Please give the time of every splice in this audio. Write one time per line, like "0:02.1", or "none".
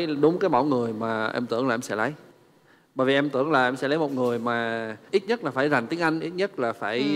none

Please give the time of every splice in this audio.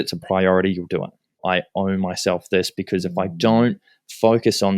0:01.4

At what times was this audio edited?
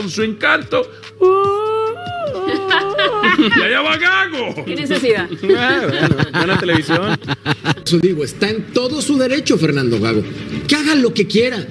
0:08.0

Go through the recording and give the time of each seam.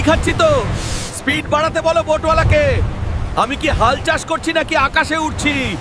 none

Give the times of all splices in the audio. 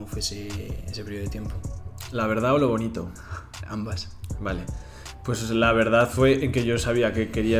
none

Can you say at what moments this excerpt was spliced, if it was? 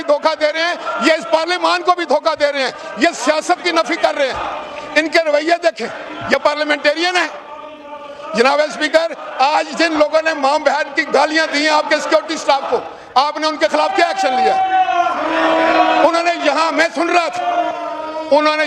none

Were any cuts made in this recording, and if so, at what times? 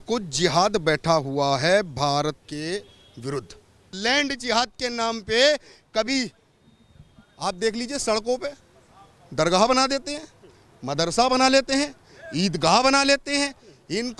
0:02.4
0:03.9

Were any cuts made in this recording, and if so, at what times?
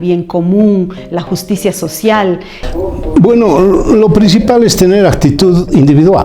0:02.5

